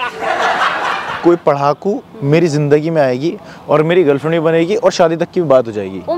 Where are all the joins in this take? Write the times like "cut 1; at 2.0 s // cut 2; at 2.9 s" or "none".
cut 1; at 1.2 s